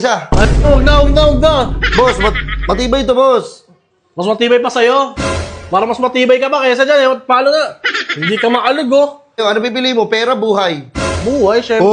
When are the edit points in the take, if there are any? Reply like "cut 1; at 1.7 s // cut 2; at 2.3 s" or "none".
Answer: cut 1; at 9.4 s

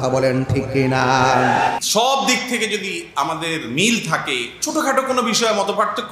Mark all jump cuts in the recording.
cut 1; at 1.7 s

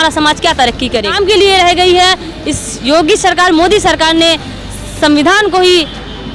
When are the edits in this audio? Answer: cut 1; at 1.1 s

